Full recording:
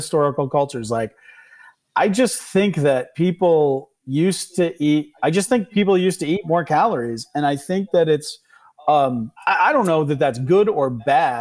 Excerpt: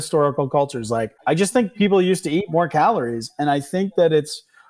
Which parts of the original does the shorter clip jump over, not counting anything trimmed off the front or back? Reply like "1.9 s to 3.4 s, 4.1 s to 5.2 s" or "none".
1.2 s to 5.1 s